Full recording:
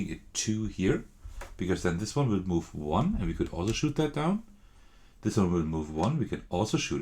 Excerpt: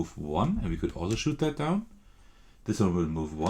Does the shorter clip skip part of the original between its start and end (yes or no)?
no